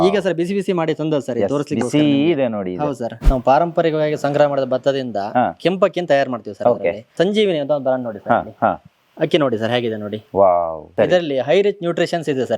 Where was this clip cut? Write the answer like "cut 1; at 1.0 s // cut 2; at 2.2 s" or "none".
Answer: cut 1; at 3.1 s // cut 2; at 7.1 s // cut 3; at 10.8 s